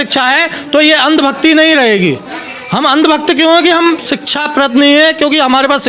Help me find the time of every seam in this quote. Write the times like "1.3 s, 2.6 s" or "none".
none